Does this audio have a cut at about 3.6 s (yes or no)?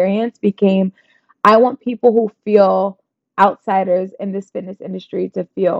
no